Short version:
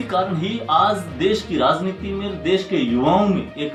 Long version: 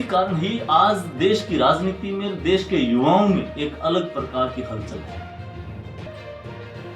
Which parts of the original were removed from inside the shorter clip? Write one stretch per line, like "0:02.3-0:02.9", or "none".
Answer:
none